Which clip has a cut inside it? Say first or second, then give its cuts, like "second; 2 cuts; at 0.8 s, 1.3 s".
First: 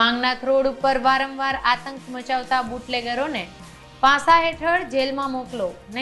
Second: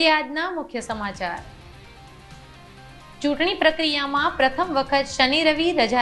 second; 2 cuts; at 1.5 s, 3.2 s